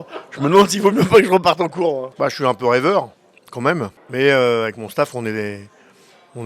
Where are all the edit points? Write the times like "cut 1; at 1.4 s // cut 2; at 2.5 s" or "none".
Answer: cut 1; at 2.1 s // cut 2; at 4.0 s